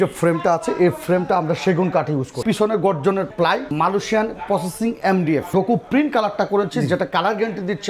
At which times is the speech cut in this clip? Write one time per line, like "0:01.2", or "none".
0:02.4
0:03.7
0:05.5